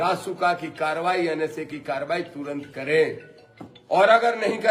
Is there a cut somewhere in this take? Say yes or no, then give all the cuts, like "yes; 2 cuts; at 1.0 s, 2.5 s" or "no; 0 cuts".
no; 0 cuts